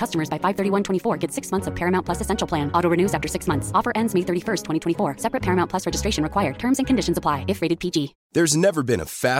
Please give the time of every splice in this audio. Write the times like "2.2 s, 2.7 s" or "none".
none